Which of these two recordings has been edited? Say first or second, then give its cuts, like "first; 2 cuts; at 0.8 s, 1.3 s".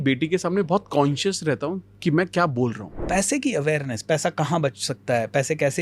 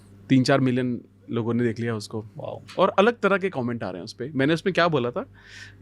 first; 1 cut; at 2.9 s